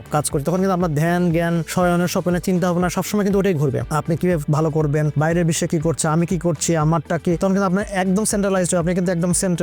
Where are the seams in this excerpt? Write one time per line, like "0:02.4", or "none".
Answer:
none